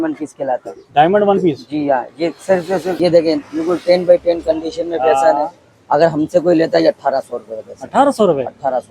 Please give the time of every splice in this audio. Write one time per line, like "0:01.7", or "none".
0:02.9